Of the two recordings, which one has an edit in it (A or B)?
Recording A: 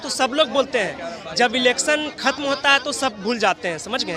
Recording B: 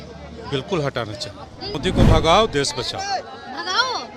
B